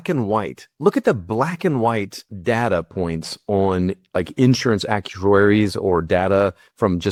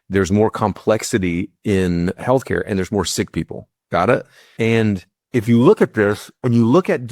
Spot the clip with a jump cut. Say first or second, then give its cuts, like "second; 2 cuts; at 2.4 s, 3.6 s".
second; 1 cut; at 2.2 s